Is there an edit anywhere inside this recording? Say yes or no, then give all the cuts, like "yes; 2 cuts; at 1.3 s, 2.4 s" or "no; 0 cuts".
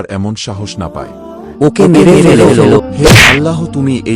yes; 2 cuts; at 1.4 s, 2.8 s